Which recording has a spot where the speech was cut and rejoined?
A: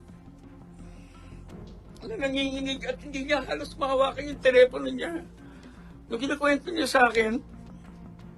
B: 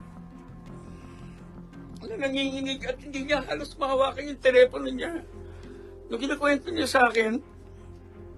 A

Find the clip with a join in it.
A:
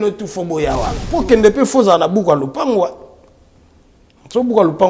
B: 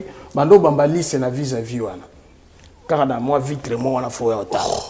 A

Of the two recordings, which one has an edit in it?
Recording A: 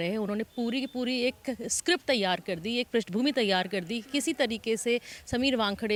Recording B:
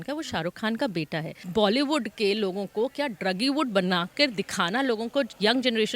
B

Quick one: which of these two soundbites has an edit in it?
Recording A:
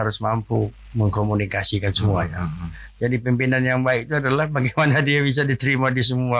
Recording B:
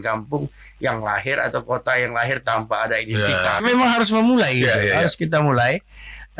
B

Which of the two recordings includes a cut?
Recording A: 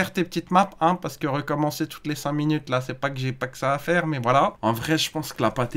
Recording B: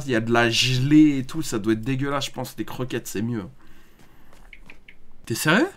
A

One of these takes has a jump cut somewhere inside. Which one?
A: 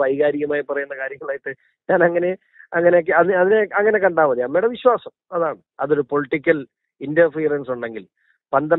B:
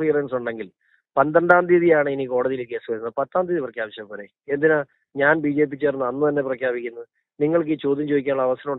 A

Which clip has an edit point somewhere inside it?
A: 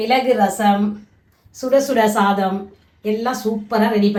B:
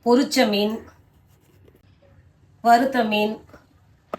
B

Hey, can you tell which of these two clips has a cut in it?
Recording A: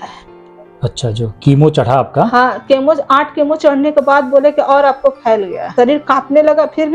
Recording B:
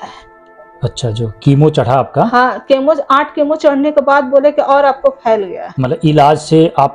A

